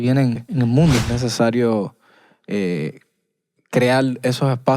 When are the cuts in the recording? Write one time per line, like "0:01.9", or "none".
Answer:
0:01.0